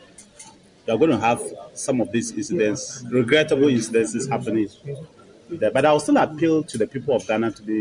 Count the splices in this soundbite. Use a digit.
0